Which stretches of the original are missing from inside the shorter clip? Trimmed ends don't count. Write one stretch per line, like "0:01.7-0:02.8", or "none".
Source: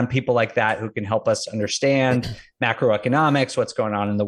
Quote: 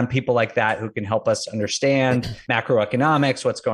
0:02.4-0:02.5